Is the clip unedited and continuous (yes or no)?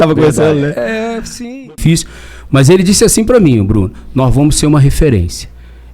no